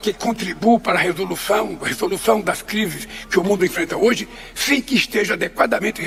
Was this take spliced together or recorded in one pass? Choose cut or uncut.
uncut